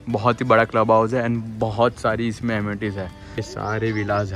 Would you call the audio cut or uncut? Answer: cut